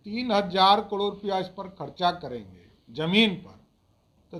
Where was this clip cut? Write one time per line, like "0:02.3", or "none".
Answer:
none